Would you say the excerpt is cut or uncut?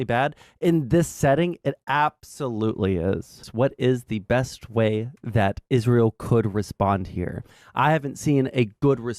cut